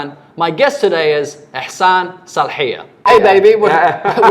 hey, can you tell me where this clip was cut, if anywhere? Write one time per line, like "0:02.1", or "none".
0:03.0